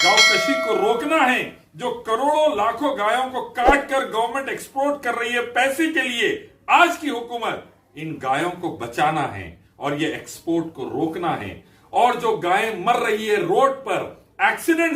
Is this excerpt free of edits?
yes; 0 cuts

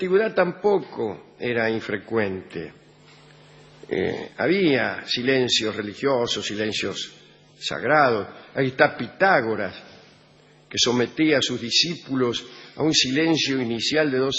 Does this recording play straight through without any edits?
yes; 0 cuts

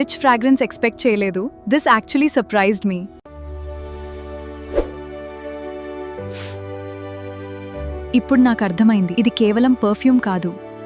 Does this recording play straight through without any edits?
no; 1 cut; at 3.2 s

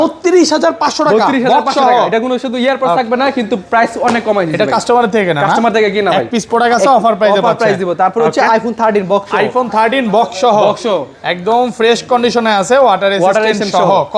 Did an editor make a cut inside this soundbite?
no; 0 cuts

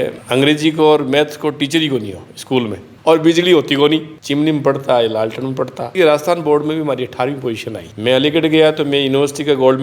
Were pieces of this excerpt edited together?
yes; 3 cuts; at 3.0 s, 5.9 s, 7.8 s

